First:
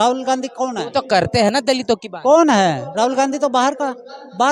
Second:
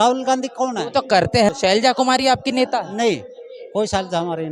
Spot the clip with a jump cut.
second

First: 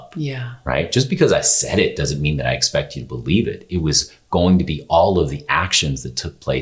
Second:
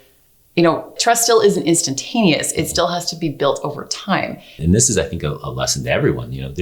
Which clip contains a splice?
second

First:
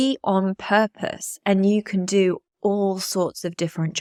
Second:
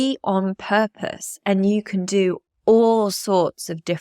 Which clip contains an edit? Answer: second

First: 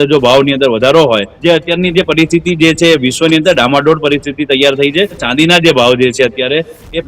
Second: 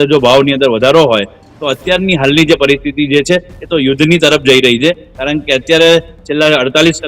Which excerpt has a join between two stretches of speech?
first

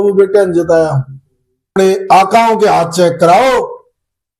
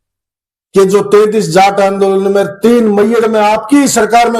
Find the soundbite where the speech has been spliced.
first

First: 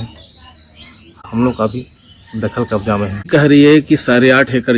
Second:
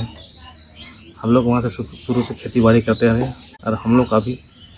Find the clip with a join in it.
first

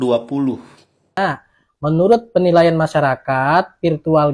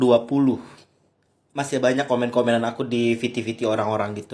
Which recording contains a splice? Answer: first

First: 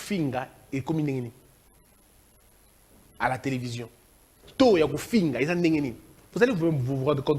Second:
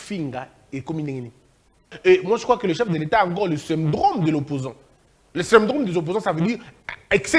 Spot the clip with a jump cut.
second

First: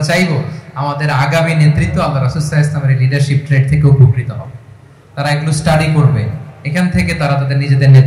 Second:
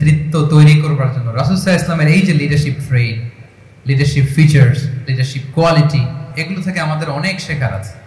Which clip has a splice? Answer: second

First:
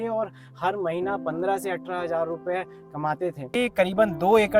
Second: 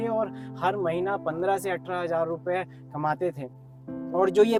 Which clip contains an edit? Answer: first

